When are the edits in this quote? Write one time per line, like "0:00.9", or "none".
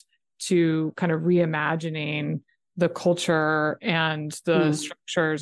none